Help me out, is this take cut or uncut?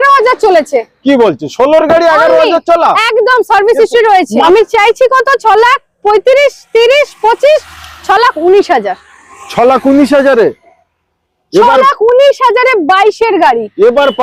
cut